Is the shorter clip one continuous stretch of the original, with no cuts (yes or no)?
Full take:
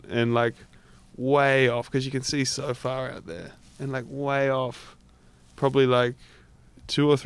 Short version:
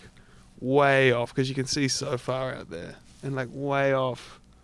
yes